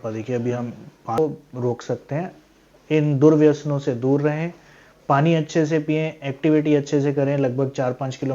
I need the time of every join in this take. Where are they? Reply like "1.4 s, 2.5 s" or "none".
1.2 s